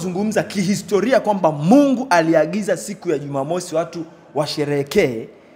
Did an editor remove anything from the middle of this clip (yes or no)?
no